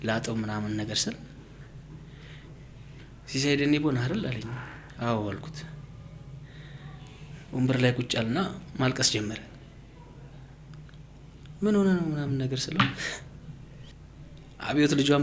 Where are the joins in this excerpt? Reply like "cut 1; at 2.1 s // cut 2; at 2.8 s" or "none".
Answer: cut 1; at 13.9 s